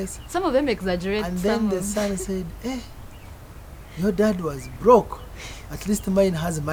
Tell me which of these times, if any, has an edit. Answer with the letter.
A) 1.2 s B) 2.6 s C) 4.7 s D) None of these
D